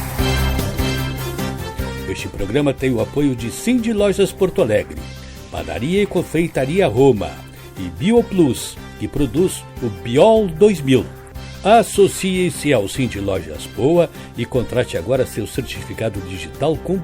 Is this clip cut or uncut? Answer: cut